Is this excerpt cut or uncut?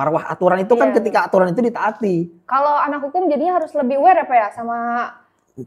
uncut